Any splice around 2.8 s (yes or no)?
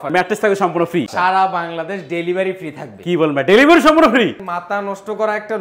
no